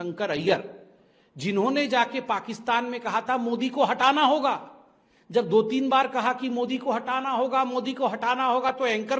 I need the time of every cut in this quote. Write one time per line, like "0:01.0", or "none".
none